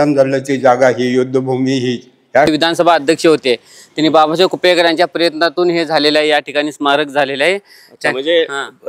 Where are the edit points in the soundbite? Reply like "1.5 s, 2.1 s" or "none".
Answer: 2.5 s